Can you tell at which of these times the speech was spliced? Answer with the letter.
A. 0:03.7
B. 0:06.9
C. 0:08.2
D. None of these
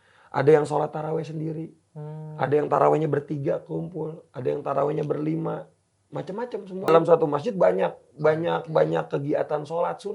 B